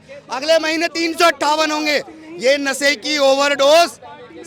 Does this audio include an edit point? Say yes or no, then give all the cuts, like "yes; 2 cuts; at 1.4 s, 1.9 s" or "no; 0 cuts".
no; 0 cuts